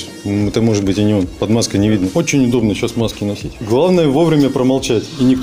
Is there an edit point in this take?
yes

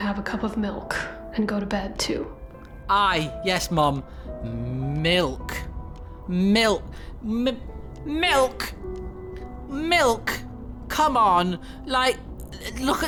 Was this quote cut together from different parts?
no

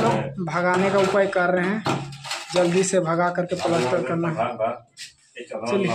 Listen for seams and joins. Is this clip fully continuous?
yes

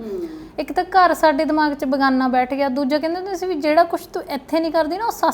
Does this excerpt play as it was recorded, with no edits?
yes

